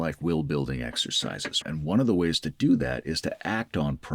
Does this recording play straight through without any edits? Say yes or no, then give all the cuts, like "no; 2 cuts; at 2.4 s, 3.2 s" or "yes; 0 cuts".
no; 1 cut; at 1.6 s